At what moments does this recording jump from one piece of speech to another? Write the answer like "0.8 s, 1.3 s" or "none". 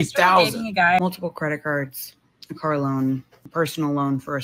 1.0 s, 3.4 s